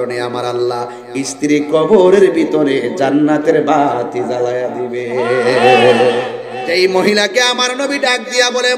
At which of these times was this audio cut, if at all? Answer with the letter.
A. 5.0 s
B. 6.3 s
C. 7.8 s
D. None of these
B